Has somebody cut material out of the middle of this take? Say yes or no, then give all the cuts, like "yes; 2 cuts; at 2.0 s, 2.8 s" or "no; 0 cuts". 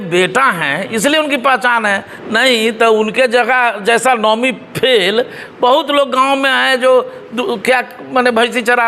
no; 0 cuts